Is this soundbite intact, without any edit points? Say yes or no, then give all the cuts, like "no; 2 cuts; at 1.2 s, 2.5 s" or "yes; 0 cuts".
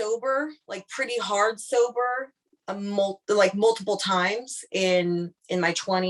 yes; 0 cuts